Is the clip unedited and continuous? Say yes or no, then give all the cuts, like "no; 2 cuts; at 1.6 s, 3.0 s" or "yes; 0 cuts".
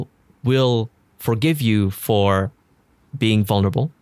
yes; 0 cuts